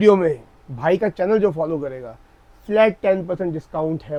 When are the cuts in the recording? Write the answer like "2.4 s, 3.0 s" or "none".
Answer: none